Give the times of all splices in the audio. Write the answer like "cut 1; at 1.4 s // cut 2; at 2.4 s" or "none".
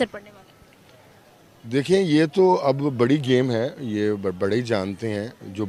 none